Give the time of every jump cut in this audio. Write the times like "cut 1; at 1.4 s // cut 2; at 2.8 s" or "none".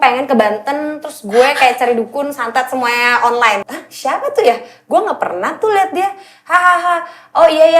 cut 1; at 3.6 s